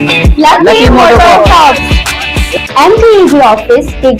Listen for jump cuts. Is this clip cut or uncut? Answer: uncut